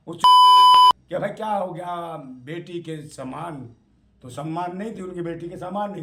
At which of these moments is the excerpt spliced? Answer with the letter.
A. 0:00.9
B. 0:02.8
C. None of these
A